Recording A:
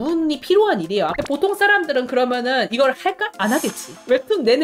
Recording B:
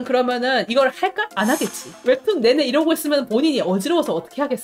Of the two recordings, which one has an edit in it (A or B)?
A